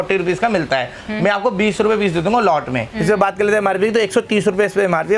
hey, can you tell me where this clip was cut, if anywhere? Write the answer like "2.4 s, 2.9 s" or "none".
2.9 s